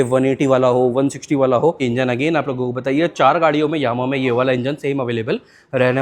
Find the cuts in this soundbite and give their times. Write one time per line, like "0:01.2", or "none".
0:01.8